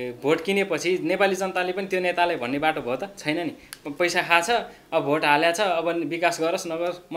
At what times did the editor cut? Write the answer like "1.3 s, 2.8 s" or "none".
none